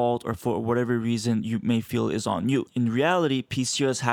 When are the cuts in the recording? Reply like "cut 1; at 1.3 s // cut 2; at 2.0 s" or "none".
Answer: cut 1; at 2.7 s

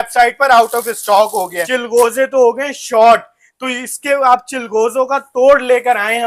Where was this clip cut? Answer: cut 1; at 1.6 s

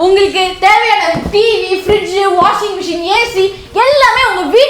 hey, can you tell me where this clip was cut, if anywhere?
none

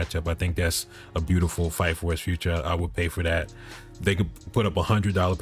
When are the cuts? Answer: none

